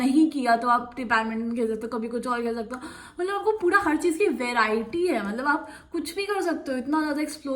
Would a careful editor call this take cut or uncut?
uncut